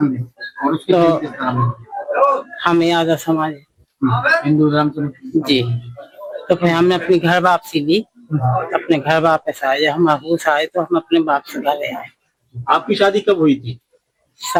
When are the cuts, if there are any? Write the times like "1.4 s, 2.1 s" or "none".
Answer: none